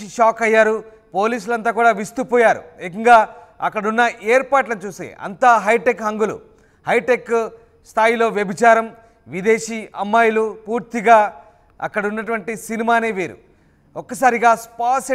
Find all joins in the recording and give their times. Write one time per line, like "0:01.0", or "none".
none